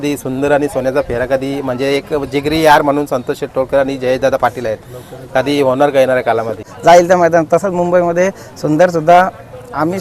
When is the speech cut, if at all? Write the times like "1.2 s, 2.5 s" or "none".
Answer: 6.7 s

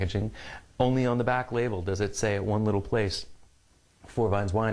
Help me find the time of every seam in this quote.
3.4 s

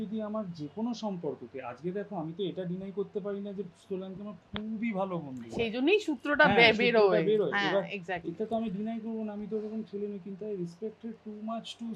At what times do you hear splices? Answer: none

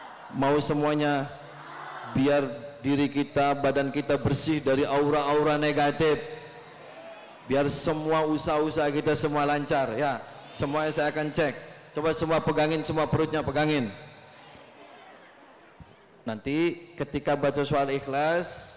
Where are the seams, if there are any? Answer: 15.7 s

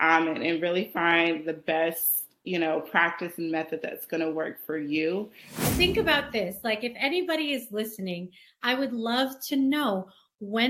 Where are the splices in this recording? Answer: 5.6 s

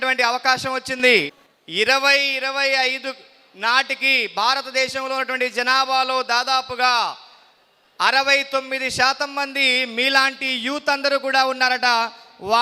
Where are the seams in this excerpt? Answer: 1.3 s

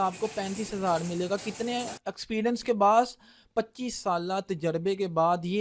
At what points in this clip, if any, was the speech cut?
none

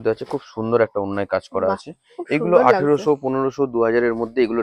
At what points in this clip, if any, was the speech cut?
none

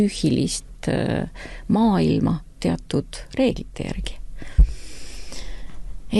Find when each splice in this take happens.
none

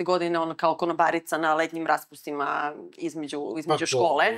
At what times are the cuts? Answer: none

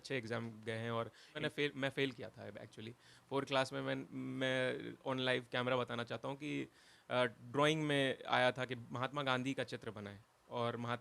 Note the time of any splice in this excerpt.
1.4 s

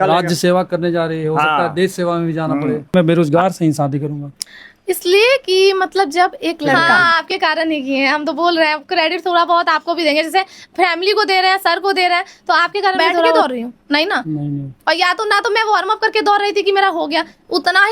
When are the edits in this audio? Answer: 2.9 s, 7.0 s, 13.4 s

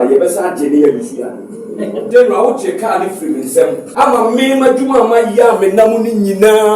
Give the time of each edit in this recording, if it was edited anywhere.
2.0 s, 3.9 s

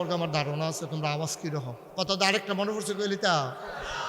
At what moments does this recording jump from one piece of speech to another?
1.8 s

